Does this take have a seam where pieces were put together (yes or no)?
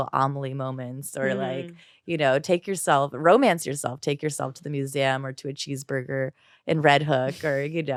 no